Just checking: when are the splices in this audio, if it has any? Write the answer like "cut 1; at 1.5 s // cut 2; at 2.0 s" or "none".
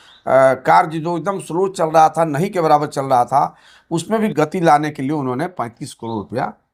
none